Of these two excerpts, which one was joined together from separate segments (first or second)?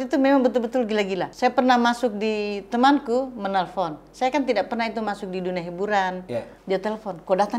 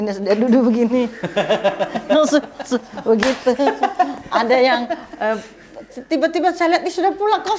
first